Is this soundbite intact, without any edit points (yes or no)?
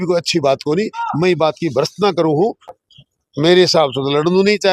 no